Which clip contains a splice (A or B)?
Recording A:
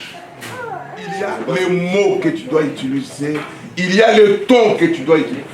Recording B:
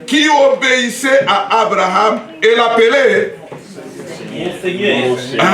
A